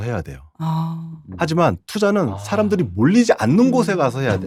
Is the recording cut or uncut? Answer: uncut